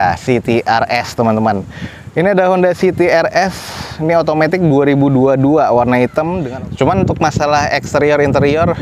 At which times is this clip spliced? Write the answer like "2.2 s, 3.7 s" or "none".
6.4 s